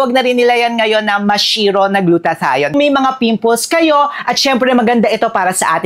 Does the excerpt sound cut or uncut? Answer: cut